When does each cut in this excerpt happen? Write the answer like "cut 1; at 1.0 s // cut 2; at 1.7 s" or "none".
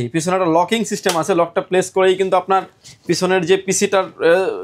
none